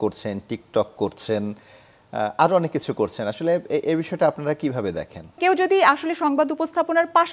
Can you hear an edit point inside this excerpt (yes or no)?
yes